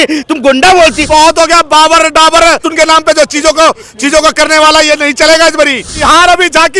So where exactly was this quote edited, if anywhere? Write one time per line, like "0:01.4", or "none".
0:01.1
0:02.7
0:06.0